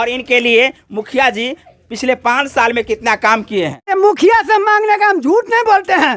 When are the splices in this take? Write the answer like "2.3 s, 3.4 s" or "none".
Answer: 3.9 s